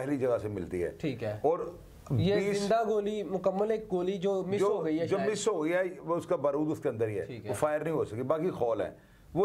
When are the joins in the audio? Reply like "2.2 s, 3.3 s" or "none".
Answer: none